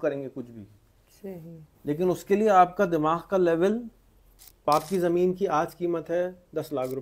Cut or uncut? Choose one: cut